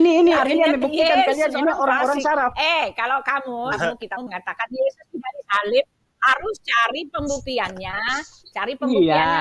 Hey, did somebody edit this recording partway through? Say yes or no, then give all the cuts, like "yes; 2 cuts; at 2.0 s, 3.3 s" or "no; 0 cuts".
no; 0 cuts